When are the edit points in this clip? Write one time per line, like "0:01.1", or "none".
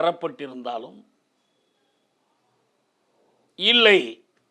none